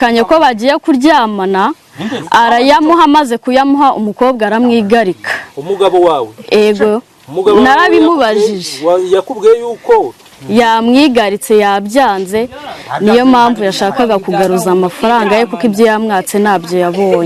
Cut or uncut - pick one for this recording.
uncut